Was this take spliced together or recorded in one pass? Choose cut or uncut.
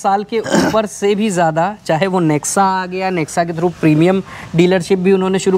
uncut